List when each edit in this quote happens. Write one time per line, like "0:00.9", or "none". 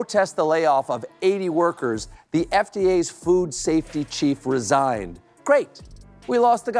none